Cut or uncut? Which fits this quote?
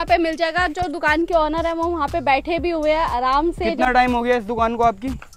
uncut